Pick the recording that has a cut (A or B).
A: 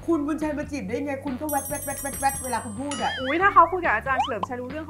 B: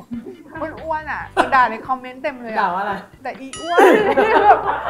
B